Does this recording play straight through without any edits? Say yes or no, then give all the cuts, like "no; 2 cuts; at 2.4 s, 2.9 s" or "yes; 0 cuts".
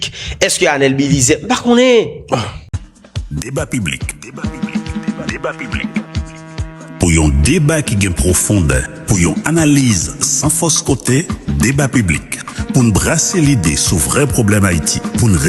no; 1 cut; at 2.7 s